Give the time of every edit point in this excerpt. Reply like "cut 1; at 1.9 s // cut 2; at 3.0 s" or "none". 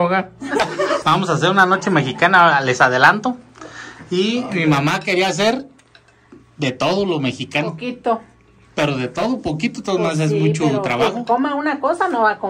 cut 1; at 1.0 s